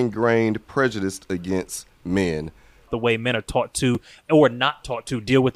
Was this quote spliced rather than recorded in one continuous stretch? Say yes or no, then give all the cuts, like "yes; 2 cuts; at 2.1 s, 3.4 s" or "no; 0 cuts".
yes; 1 cut; at 2.9 s